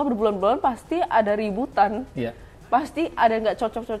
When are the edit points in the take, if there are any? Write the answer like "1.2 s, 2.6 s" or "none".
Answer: none